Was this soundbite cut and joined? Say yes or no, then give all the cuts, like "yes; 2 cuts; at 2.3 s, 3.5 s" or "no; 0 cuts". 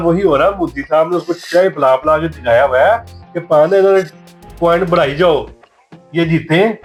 no; 0 cuts